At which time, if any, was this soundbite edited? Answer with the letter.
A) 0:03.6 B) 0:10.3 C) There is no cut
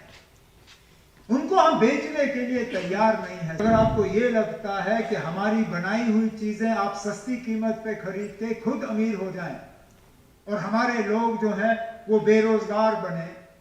A